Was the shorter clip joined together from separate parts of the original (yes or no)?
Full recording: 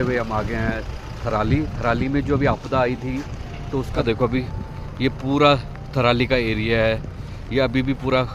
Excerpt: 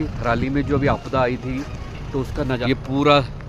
yes